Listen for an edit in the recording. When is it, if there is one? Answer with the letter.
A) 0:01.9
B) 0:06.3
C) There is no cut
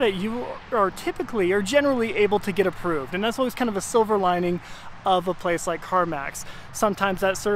C